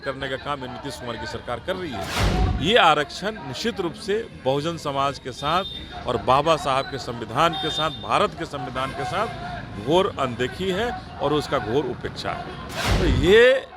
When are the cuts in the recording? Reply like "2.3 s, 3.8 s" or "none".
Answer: 2.1 s, 12.8 s

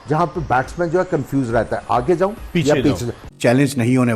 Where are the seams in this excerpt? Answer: 3.2 s

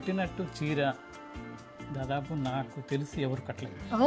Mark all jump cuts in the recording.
none

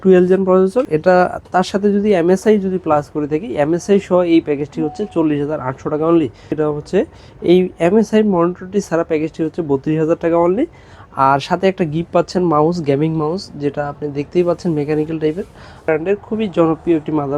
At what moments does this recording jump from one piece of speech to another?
0.9 s, 6.6 s, 15.9 s

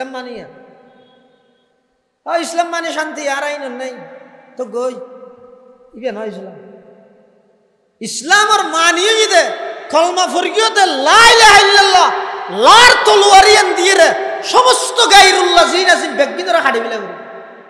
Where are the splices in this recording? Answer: none

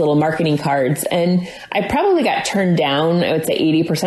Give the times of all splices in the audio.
none

